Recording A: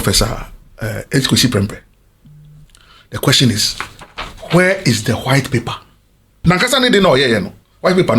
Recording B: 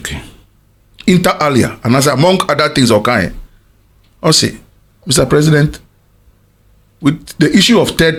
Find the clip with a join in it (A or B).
A